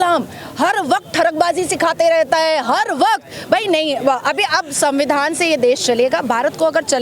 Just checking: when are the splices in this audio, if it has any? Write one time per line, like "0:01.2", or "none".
none